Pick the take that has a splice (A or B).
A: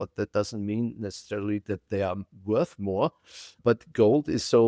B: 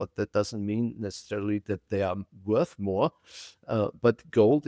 A